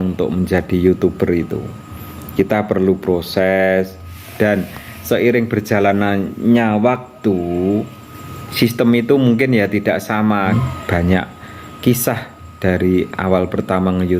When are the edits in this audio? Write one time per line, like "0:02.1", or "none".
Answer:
0:10.5